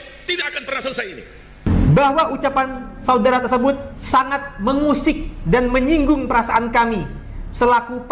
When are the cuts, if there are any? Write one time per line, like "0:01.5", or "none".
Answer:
0:01.7

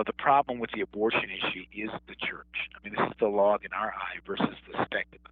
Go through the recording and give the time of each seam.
0:01.6

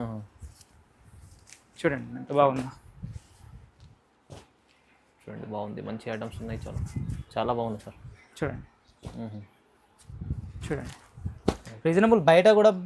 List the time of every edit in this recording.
none

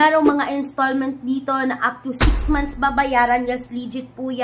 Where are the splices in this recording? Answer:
none

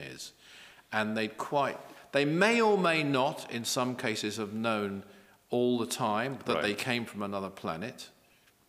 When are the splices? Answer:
none

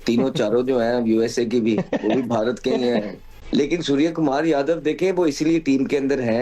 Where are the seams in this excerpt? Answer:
0:03.4

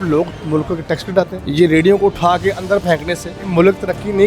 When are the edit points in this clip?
0:01.4
0:03.3

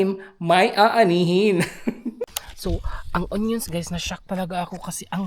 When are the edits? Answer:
0:02.2

